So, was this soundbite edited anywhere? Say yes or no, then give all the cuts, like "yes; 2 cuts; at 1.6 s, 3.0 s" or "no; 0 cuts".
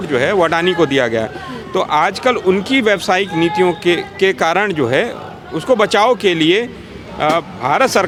no; 0 cuts